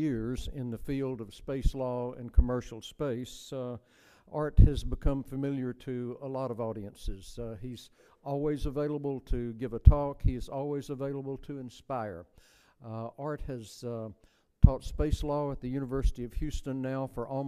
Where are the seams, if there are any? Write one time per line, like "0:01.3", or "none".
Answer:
0:09.2